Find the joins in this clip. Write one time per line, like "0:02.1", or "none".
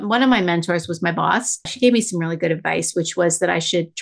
0:01.7